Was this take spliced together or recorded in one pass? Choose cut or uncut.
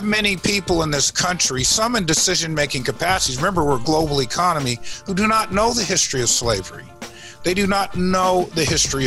uncut